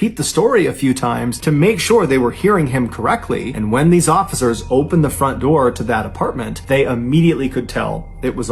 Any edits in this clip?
yes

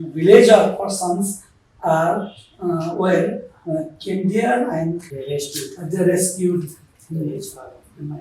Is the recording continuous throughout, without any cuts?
no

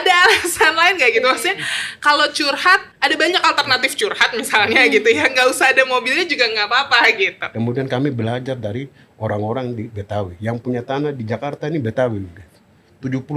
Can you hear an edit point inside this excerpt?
yes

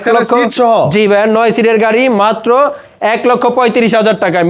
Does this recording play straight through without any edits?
yes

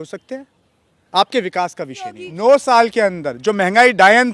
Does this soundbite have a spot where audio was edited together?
yes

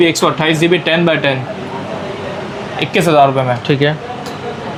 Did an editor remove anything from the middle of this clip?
no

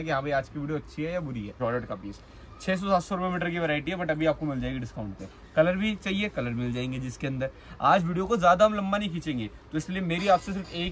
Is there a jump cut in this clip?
yes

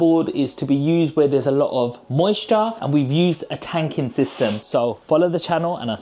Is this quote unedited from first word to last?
no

